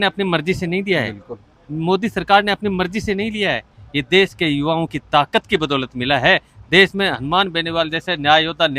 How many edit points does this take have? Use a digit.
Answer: 0